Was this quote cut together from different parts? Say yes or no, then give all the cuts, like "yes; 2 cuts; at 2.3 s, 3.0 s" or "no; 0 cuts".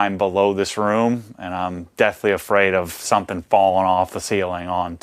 no; 0 cuts